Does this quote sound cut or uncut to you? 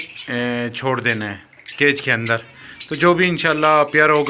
uncut